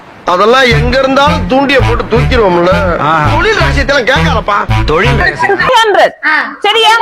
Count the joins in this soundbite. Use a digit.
1